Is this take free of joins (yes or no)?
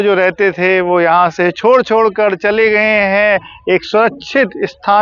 yes